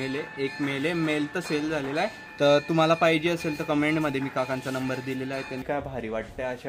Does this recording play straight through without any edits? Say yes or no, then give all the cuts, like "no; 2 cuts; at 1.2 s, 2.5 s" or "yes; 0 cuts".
no; 2 cuts; at 2.2 s, 5.6 s